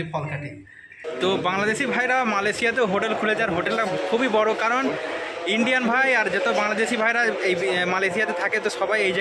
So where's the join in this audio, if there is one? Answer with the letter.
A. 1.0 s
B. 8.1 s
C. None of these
A